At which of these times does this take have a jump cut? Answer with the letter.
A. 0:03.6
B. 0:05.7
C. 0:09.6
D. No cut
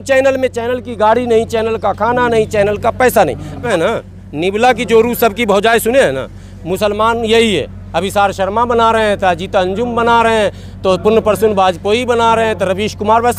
A